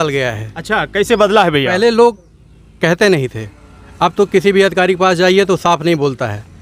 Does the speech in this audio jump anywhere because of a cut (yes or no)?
no